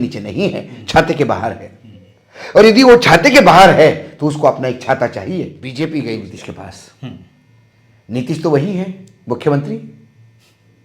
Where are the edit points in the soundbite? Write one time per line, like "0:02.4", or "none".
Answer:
0:05.6

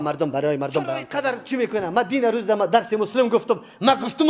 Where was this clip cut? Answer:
0:01.1

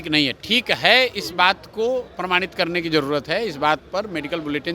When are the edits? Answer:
none

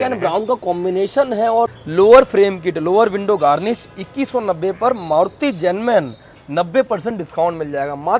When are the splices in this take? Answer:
0:01.8

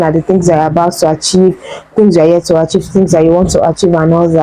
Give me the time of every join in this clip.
none

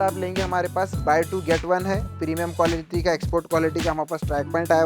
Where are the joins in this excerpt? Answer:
0:02.1

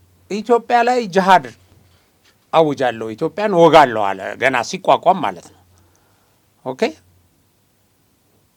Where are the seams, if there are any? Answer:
none

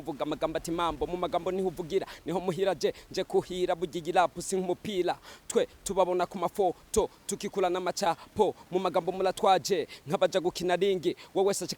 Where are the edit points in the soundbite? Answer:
none

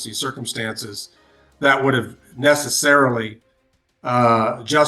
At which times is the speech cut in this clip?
none

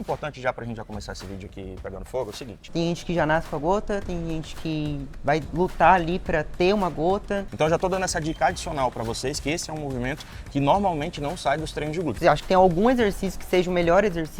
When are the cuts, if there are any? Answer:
0:02.6
0:07.5
0:12.2

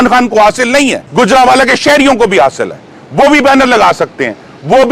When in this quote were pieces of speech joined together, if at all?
0:01.0

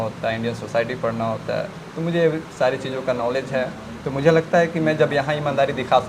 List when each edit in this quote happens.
none

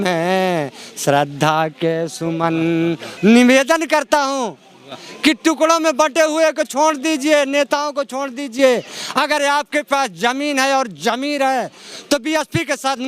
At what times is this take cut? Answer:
0:03.1

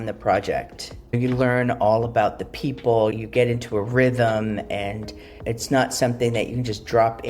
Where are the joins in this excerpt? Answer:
0:01.2
0:03.1

